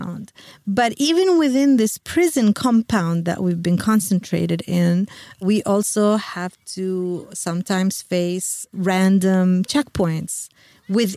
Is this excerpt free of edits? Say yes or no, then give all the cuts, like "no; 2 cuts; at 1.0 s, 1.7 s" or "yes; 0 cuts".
yes; 0 cuts